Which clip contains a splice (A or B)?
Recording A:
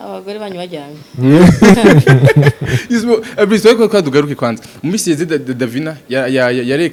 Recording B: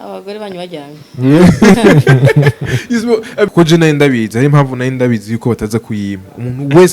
B